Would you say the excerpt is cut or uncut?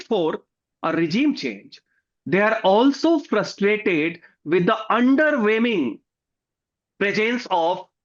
uncut